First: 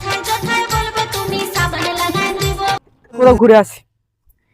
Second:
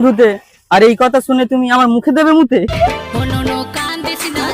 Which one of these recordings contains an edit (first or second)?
first